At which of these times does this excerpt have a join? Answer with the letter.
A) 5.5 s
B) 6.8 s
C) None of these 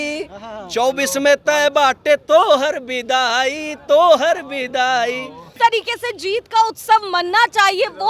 A